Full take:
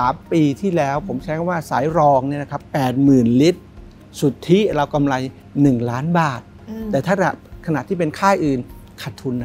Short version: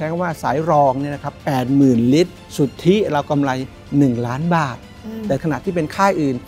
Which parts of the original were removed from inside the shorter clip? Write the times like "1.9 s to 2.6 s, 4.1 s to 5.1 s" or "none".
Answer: 3.7 s to 4.1 s, 7.0 s to 7.6 s